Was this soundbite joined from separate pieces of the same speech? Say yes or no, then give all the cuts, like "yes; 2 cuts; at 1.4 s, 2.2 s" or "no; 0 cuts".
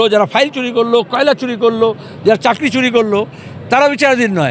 no; 0 cuts